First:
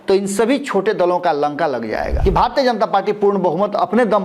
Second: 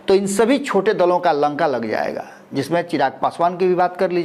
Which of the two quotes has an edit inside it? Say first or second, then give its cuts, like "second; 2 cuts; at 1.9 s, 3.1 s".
first; 1 cut; at 2.1 s